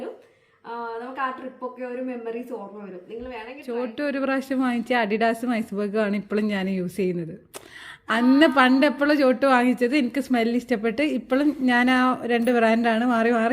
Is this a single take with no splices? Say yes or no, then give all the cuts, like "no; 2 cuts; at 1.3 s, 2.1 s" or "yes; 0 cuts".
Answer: no; 1 cut; at 3.5 s